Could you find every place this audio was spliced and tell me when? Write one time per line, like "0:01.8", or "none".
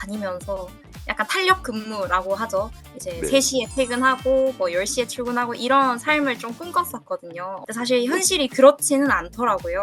0:07.6

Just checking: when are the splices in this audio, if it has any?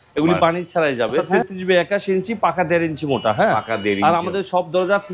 0:01.3

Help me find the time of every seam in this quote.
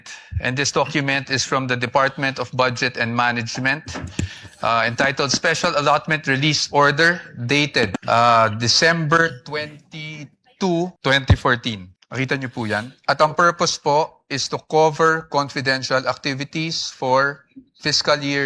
0:08.0
0:11.0
0:12.0
0:12.9

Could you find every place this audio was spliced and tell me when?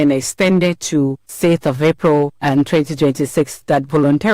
0:01.2
0:02.4

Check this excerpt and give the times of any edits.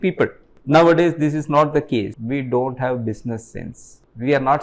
0:02.2

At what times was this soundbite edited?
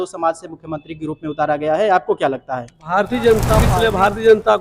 0:03.7

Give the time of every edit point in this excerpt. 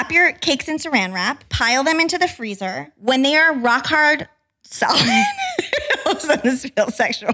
0:01.3

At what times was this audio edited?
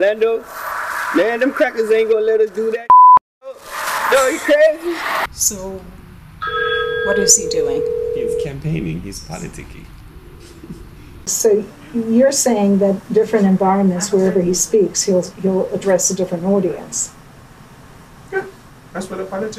0:05.3

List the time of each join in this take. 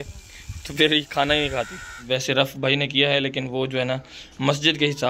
0:01.9

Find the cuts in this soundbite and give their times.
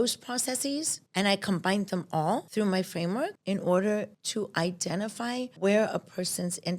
0:01.0
0:02.5
0:03.4
0:04.2
0:05.5

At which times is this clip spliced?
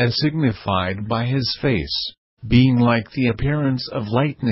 0:01.3

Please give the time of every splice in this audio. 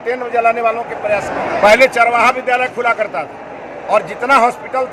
0:01.3

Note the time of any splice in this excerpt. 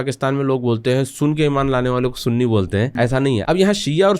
0:03.0

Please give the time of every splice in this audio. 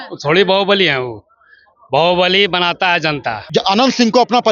0:03.4

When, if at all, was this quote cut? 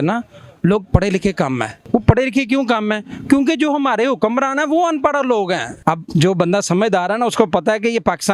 0:01.8
0:05.7

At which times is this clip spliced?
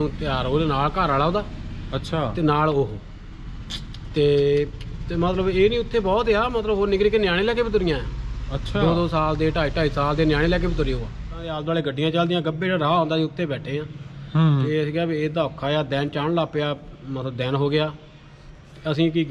0:11.6

